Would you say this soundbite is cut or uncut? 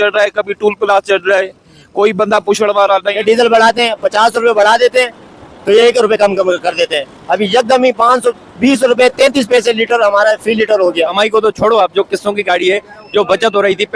cut